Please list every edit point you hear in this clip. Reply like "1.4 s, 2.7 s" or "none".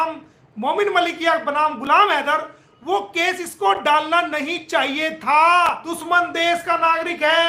5.9 s